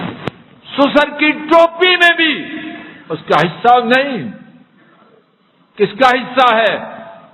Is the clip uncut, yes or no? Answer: yes